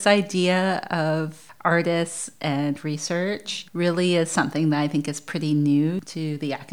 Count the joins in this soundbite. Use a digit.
2